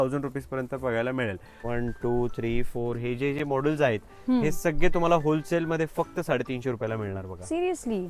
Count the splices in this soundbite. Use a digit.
1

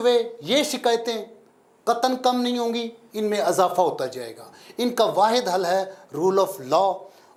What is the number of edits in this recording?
0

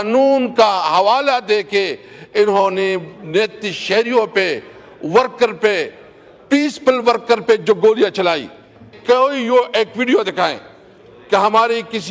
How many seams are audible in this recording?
1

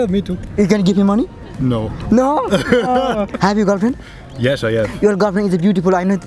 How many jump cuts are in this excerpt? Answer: 1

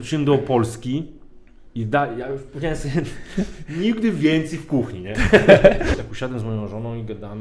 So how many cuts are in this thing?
1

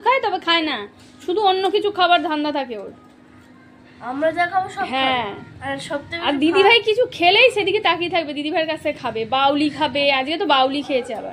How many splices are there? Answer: 0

